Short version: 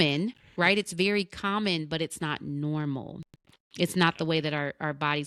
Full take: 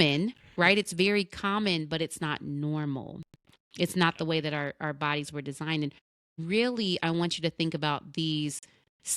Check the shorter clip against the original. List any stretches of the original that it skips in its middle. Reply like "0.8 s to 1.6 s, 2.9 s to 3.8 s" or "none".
none